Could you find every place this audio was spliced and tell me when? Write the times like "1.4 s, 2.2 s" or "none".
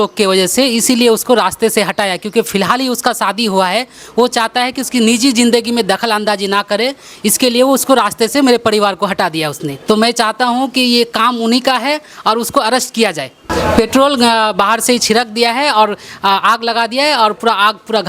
9.7 s, 13.4 s